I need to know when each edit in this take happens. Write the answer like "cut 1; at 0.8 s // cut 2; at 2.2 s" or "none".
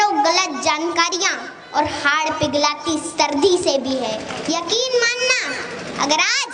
cut 1; at 4.3 s

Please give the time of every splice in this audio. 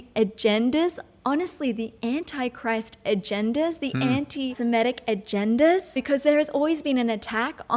cut 1; at 4.5 s // cut 2; at 6.0 s

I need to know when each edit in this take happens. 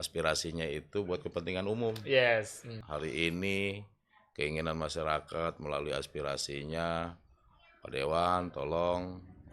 cut 1; at 2.7 s

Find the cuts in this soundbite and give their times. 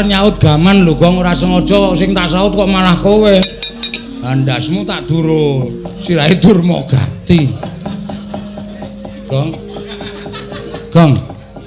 none

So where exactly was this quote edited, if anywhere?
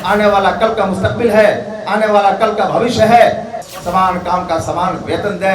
cut 1; at 3.7 s

